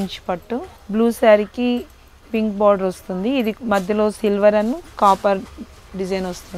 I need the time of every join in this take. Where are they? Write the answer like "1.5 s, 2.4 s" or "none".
none